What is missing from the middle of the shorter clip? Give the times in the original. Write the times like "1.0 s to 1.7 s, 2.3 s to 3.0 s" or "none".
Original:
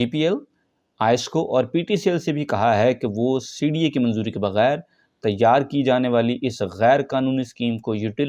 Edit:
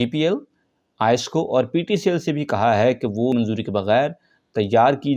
3.3 s to 4.0 s